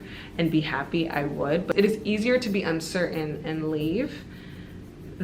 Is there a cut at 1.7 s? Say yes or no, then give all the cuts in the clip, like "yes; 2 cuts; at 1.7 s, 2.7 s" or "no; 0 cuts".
yes; 1 cut; at 1.7 s